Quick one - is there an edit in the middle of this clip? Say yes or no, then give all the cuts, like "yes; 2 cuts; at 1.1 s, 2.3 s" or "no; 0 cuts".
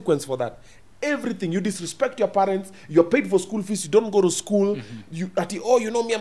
no; 0 cuts